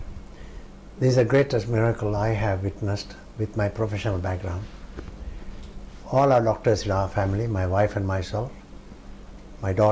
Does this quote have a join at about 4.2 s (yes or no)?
no